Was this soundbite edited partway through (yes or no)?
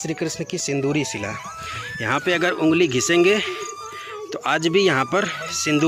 no